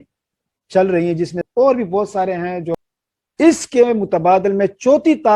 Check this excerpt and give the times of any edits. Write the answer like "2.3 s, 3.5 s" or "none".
1.4 s, 2.8 s